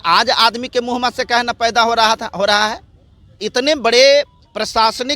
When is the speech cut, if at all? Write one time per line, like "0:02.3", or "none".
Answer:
0:03.4